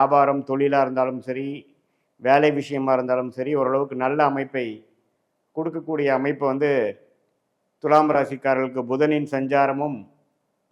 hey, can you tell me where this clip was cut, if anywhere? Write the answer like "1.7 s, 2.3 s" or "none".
none